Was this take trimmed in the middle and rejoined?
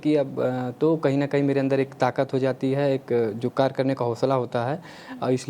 no; 0 cuts

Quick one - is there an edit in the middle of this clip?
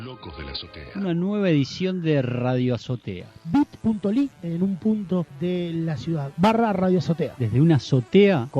yes; 1 cut; at 0.9 s

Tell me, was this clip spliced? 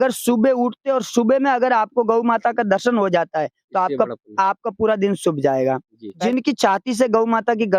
yes; 1 cut; at 6.1 s

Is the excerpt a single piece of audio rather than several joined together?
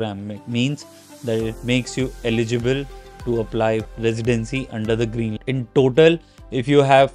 no; 2 cuts; at 3.9 s, 5.4 s

